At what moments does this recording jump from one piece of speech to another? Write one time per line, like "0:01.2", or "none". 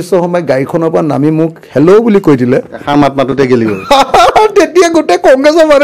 none